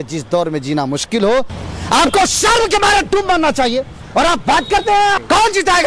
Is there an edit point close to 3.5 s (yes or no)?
no